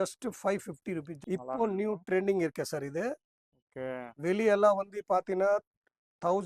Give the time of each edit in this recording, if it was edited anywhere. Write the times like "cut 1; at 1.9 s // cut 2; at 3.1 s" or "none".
cut 1; at 1.1 s